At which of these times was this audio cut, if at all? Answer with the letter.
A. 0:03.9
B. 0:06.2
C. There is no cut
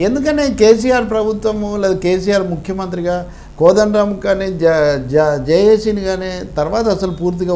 C